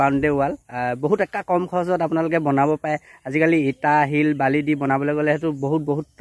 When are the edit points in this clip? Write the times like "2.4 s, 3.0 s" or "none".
none